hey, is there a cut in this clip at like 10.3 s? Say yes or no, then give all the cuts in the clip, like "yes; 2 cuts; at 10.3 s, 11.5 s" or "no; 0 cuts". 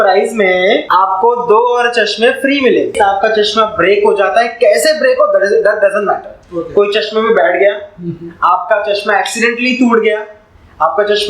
no; 2 cuts; at 0.8 s, 2.9 s